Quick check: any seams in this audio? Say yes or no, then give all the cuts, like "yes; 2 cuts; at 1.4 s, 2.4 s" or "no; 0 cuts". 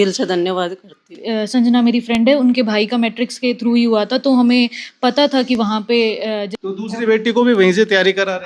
yes; 2 cuts; at 1.2 s, 6.5 s